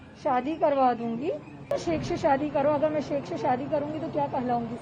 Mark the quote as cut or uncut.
cut